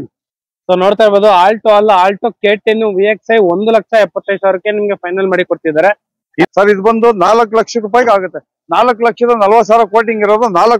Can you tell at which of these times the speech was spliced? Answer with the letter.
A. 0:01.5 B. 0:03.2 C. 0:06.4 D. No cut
C